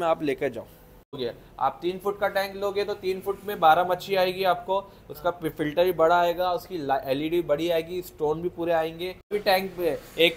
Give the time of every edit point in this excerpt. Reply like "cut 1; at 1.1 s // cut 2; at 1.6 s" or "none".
cut 1; at 1.1 s // cut 2; at 9.3 s

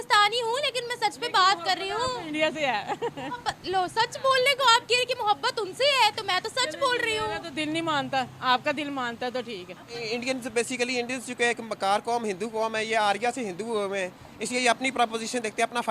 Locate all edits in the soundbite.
cut 1; at 10.0 s

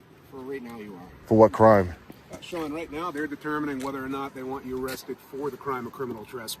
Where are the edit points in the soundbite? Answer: cut 1; at 1.1 s

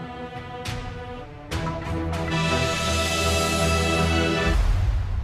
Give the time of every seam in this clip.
none

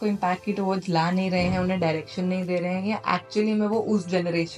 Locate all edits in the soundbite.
none

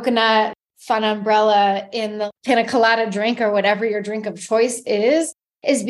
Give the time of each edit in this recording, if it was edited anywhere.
none

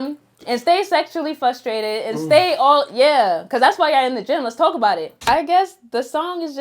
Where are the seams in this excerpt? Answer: cut 1; at 5.1 s

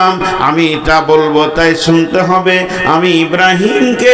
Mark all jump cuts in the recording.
none

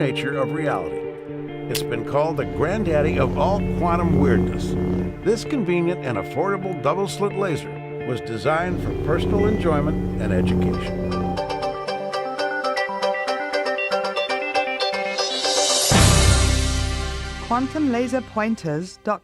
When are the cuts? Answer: cut 1; at 7.8 s

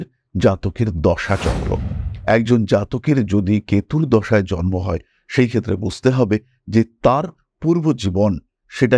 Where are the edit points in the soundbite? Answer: none

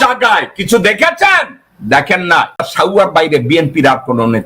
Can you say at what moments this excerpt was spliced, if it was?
cut 1; at 2.7 s

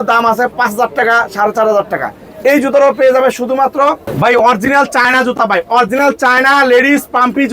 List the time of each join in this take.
cut 1; at 4.0 s

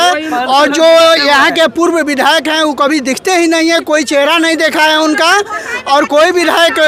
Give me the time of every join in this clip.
none

